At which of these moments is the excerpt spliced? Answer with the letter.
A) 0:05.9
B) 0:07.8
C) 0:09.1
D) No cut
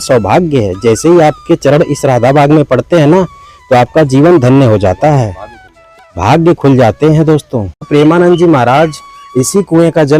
B